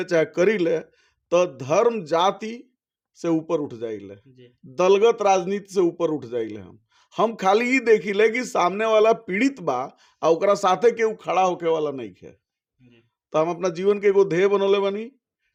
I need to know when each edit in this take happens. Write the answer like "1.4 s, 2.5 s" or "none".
none